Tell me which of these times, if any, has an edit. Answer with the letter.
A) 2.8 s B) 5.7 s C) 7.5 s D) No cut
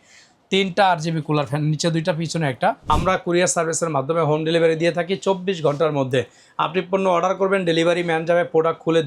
A